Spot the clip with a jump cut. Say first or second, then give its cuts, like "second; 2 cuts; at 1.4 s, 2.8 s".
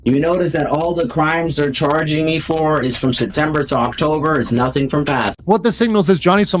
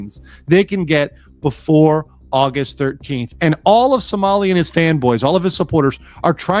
first; 1 cut; at 5.3 s